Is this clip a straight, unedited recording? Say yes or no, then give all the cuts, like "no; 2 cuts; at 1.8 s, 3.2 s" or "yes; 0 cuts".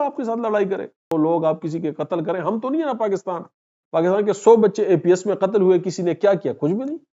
no; 1 cut; at 1.0 s